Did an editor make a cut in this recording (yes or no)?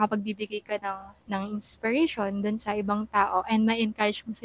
no